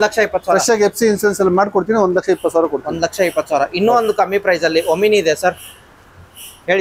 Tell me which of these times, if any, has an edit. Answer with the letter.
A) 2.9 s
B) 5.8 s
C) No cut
C